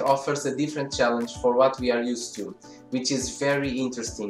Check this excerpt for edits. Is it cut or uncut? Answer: uncut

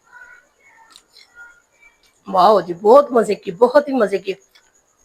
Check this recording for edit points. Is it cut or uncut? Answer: uncut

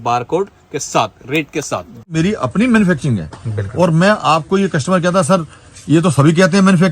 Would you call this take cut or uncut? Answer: cut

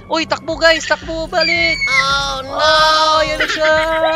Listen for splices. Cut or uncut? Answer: uncut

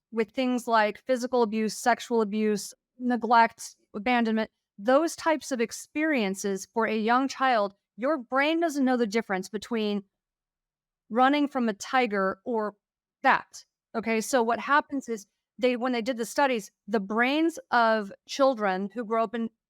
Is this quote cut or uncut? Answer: cut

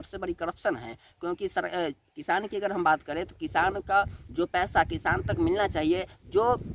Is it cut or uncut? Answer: uncut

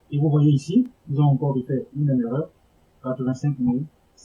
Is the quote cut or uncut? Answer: uncut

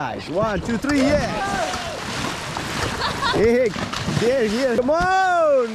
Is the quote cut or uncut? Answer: cut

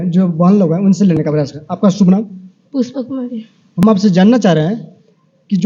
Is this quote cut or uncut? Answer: cut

